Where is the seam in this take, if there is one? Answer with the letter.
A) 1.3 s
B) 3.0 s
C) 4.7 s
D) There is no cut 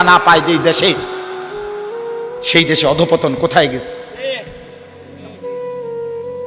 C